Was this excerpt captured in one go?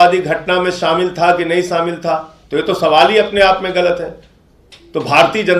yes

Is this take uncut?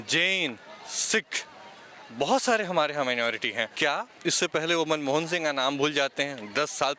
no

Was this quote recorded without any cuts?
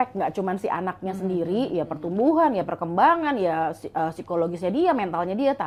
yes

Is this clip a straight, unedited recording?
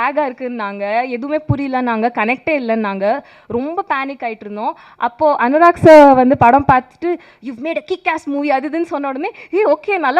yes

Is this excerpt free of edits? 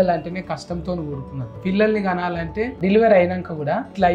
no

